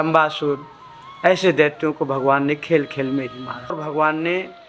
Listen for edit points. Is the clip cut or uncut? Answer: cut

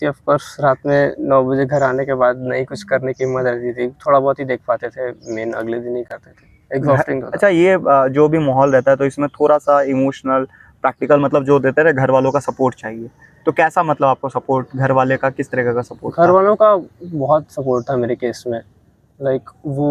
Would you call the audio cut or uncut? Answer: uncut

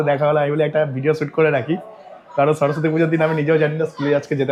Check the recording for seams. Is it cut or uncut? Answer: uncut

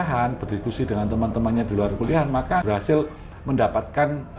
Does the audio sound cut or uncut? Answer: cut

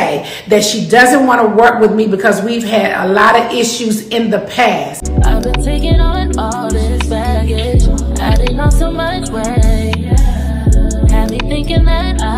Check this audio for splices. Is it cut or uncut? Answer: cut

